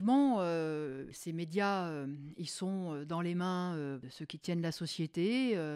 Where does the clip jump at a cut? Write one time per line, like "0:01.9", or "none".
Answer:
0:01.1
0:04.1